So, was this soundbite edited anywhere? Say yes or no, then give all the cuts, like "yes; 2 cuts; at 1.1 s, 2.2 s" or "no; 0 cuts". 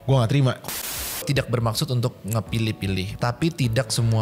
yes; 2 cuts; at 1.2 s, 3.1 s